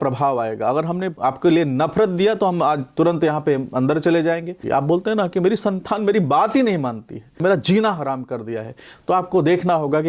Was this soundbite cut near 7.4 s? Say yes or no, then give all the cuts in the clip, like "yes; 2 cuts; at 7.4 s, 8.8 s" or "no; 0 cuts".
yes; 3 cuts; at 1.1 s, 4.6 s, 7.4 s